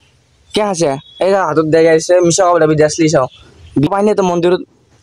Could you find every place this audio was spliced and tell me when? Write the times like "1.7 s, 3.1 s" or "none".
3.9 s